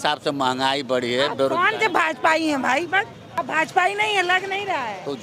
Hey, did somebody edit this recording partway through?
yes; 1 cut; at 3.2 s

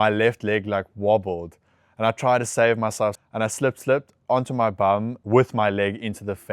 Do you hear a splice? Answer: yes; 2 cuts; at 3.2 s, 5.1 s

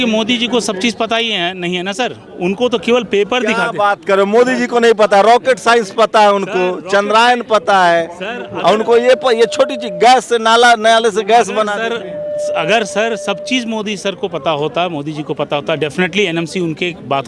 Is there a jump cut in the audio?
no; 0 cuts

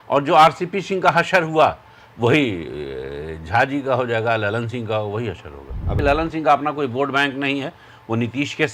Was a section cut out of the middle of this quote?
yes; 1 cut; at 5.9 s

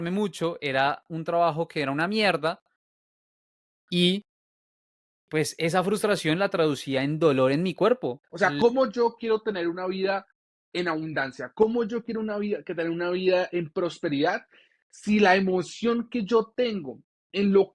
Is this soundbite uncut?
no; 1 cut; at 8.3 s

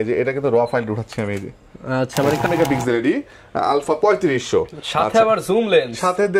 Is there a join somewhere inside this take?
yes; 1 cut; at 2.4 s

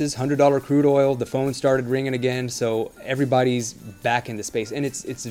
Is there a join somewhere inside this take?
no; 0 cuts

